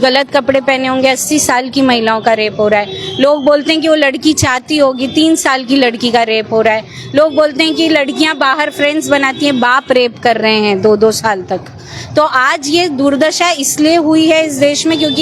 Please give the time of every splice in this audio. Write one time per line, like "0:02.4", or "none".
none